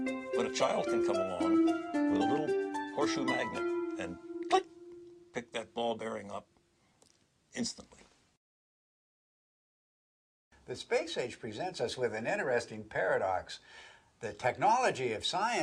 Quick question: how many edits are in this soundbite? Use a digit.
0